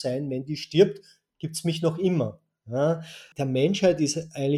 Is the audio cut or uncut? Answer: cut